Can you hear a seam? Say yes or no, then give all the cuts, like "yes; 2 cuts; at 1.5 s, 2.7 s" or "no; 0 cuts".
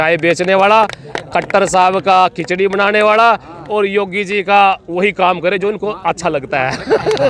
no; 0 cuts